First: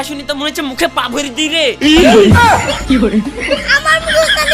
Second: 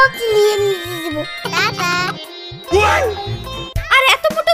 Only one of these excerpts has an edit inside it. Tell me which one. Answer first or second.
second